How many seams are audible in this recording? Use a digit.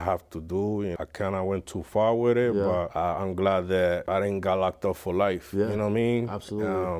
3